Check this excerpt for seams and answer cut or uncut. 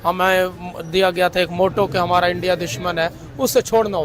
uncut